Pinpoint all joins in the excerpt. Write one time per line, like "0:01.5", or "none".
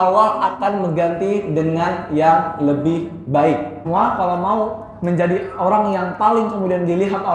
0:03.8